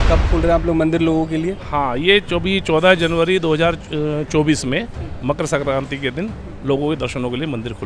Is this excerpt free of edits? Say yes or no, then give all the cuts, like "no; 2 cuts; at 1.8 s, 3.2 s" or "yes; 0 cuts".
yes; 0 cuts